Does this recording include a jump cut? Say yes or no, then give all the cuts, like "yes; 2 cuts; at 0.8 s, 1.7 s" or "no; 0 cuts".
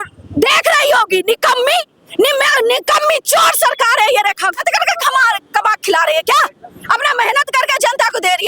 yes; 1 cut; at 4.5 s